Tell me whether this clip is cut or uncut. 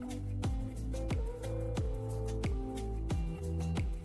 uncut